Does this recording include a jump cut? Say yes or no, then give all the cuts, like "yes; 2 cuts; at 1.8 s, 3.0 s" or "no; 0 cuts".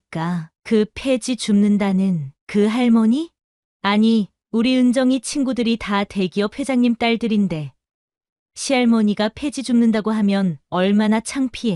no; 0 cuts